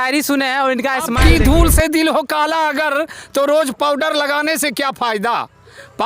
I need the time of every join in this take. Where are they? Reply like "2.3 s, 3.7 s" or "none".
1.2 s